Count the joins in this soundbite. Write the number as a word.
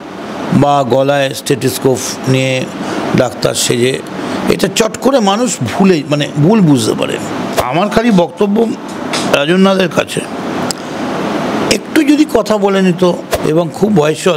two